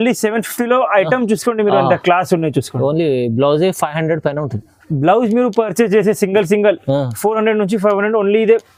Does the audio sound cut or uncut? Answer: uncut